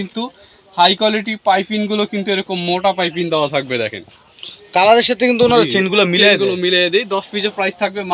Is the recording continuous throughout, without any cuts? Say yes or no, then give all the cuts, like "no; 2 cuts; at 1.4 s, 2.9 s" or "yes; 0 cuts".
yes; 0 cuts